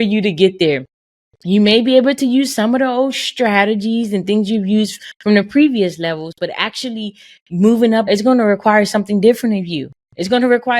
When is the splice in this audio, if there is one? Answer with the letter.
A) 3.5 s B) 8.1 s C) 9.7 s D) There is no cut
B